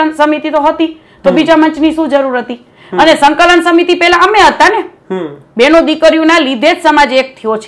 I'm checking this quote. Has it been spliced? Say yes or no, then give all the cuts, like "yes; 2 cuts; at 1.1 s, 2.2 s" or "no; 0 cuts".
no; 0 cuts